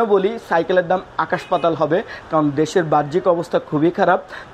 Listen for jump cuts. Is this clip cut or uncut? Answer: uncut